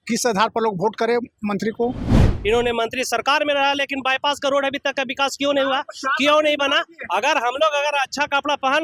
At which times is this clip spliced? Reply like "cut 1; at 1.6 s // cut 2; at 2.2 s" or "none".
cut 1; at 2.3 s